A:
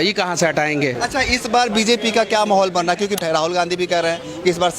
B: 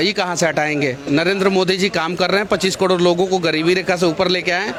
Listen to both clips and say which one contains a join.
A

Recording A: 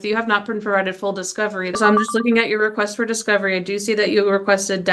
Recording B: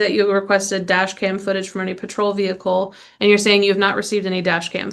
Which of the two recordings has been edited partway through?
A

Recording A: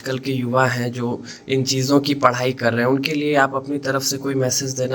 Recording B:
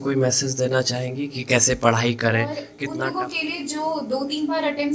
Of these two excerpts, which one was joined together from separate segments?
B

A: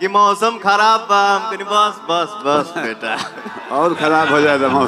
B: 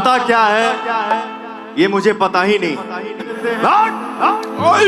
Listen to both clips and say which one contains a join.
B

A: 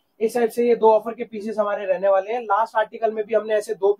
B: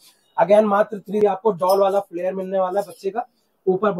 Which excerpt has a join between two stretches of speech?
B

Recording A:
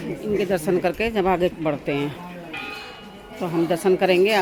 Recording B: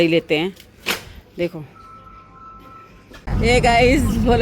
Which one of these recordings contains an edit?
B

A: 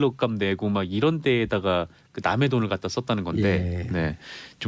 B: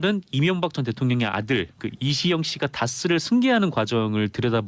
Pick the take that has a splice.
A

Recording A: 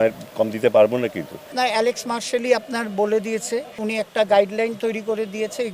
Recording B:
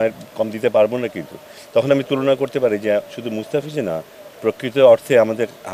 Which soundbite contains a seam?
A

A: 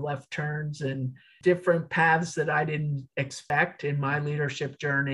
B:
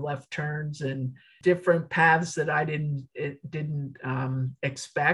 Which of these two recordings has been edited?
A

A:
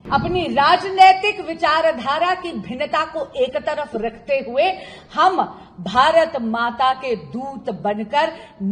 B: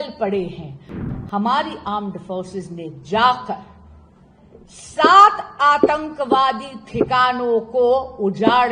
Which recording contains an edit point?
B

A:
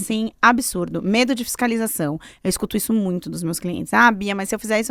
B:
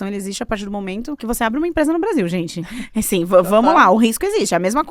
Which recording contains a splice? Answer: B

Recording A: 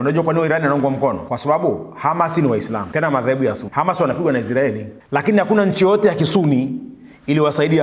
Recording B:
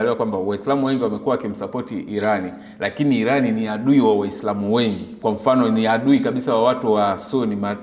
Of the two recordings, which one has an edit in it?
A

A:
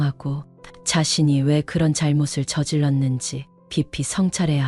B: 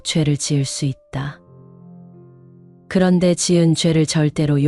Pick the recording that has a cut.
B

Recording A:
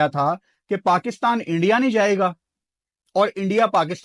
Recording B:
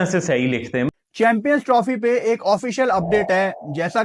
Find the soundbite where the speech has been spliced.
B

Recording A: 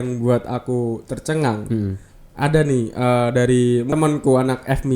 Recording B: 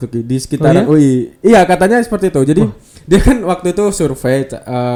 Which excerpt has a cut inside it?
A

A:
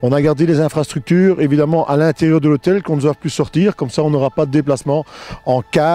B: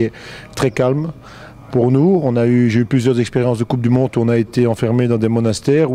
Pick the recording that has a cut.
A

